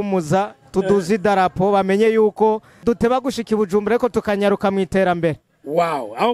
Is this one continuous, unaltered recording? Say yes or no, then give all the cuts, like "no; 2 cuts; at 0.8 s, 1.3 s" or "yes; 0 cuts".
no; 1 cut; at 2.8 s